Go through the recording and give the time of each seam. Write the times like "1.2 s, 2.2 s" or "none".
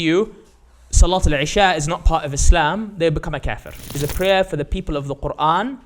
3.9 s